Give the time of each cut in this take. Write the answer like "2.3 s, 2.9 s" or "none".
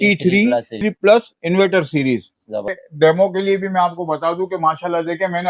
0.8 s, 2.7 s